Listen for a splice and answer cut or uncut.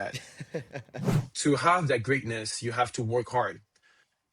cut